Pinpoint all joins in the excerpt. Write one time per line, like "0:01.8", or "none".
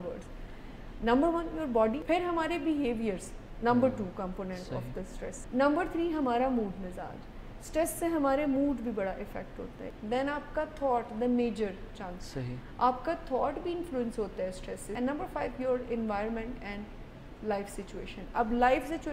none